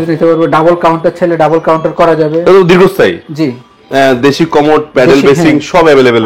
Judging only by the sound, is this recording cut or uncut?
cut